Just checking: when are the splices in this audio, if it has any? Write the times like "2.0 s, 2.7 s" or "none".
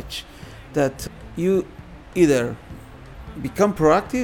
1.0 s